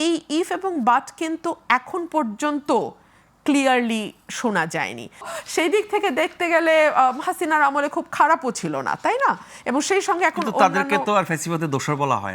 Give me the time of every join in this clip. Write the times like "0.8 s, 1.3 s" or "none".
5.3 s